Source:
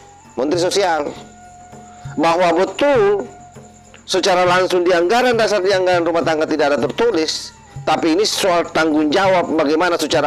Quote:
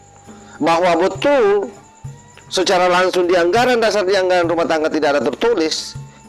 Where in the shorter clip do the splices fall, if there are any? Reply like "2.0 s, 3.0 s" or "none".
none